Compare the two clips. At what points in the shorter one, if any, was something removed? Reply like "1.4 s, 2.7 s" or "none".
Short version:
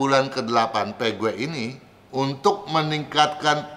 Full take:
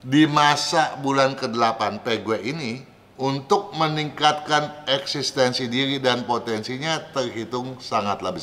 none